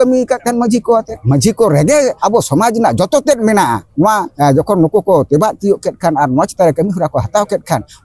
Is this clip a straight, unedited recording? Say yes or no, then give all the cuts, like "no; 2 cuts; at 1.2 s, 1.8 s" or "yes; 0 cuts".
no; 3 cuts; at 1.2 s, 2.2 s, 4.3 s